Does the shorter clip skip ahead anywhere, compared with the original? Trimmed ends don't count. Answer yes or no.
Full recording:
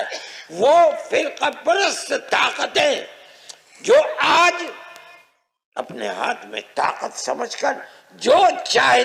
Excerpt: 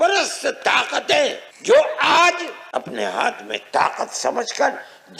yes